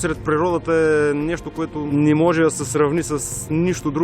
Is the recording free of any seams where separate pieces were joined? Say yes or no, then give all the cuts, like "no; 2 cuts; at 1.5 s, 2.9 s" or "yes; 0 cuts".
no; 1 cut; at 1.8 s